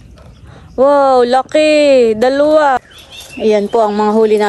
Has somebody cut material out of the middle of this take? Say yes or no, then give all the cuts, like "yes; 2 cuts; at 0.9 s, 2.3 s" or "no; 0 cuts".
yes; 1 cut; at 2.9 s